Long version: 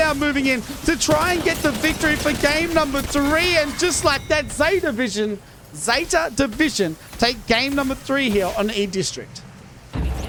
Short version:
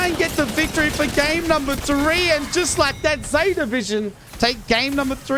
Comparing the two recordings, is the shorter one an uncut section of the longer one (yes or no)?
no